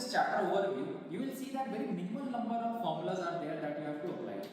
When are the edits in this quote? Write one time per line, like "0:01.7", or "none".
0:01.0